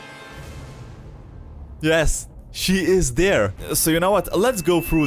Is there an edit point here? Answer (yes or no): yes